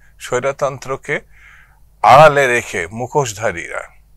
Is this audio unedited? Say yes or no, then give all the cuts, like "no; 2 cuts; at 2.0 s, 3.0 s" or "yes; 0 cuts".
yes; 0 cuts